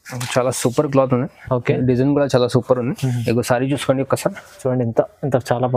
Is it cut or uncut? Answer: uncut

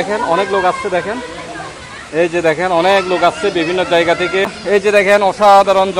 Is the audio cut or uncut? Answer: cut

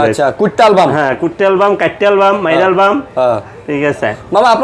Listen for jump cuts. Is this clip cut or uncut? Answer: uncut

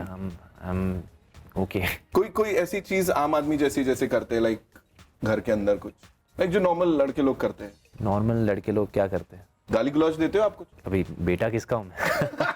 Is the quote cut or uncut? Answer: cut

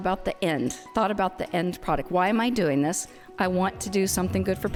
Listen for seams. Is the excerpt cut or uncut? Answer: uncut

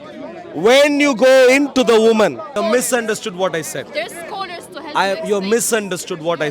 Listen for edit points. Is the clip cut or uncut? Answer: cut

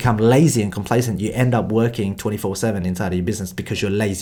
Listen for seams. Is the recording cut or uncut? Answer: uncut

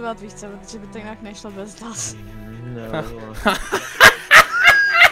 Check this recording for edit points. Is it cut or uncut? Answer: uncut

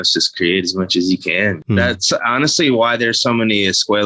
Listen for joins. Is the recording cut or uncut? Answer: cut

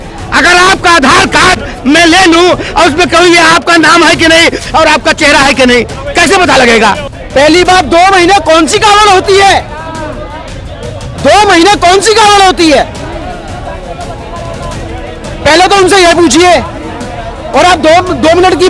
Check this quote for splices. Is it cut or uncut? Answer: cut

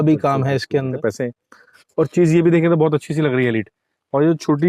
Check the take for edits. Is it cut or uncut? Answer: cut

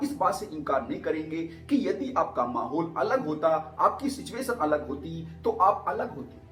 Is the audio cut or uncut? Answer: uncut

